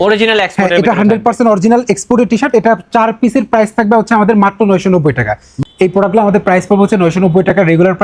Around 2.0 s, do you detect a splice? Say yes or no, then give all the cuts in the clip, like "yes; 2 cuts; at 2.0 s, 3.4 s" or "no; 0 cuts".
no; 1 cut; at 5.6 s